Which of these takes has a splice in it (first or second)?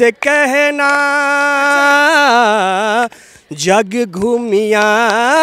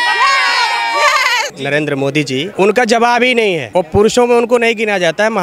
second